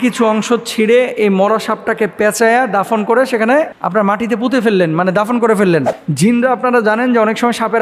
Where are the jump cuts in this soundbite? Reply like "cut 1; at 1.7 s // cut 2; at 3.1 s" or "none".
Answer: cut 1; at 6.0 s